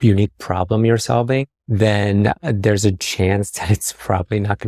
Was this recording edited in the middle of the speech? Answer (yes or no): no